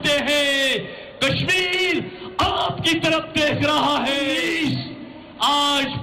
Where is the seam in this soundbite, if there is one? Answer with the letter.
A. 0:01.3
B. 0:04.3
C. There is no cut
B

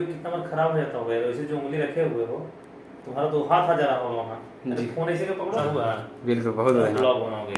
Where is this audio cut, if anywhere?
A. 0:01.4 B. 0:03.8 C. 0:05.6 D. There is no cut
C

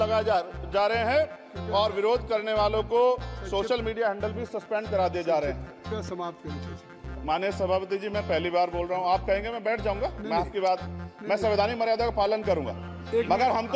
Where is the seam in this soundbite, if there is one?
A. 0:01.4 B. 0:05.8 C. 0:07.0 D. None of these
B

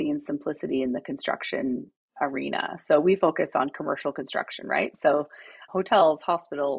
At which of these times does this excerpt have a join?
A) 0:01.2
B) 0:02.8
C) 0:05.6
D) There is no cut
C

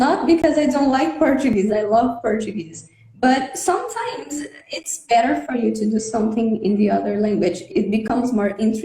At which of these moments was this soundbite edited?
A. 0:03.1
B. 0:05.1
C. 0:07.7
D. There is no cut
C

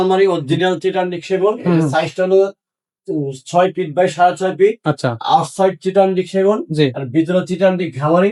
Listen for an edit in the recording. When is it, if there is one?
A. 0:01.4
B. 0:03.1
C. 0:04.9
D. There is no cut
D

